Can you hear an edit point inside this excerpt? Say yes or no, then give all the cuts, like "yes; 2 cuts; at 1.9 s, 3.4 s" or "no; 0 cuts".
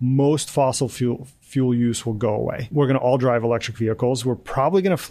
yes; 1 cut; at 2.7 s